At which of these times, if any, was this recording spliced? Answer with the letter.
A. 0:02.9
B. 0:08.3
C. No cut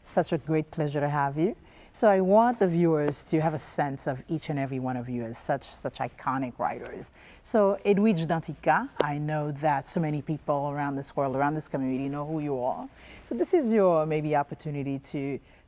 B